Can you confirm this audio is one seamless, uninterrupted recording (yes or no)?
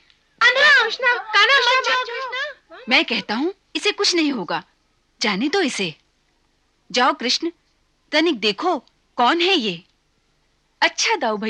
yes